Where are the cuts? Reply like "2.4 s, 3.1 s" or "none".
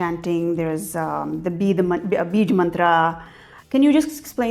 none